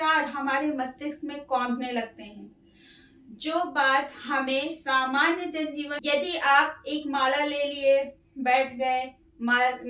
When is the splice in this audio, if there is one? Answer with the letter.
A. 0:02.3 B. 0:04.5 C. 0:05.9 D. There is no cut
C